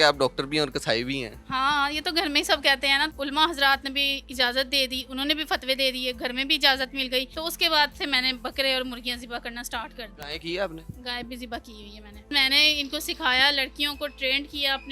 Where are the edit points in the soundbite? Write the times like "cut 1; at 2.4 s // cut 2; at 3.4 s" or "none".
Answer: cut 1; at 1.3 s // cut 2; at 3.1 s // cut 3; at 7.3 s // cut 4; at 10.2 s // cut 5; at 12.3 s